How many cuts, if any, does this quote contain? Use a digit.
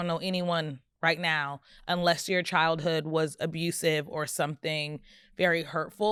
0